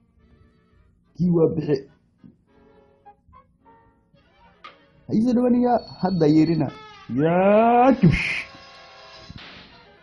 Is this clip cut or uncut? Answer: uncut